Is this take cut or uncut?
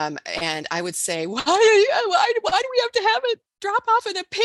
uncut